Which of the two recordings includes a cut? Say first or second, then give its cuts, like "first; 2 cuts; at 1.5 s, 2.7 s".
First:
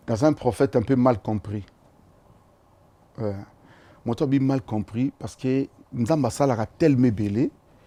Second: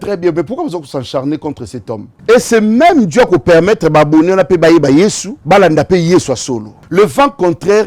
second; 3 cuts; at 2.1 s, 5.3 s, 6.7 s